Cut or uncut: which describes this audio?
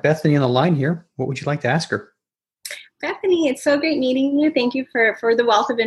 uncut